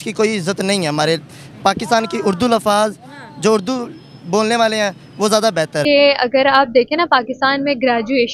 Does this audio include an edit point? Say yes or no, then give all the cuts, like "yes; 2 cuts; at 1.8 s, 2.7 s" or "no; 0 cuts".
yes; 1 cut; at 5.8 s